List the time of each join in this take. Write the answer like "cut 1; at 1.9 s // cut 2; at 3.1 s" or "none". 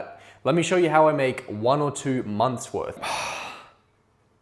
cut 1; at 3.0 s